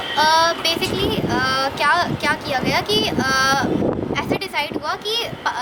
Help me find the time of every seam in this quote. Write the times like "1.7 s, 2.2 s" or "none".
none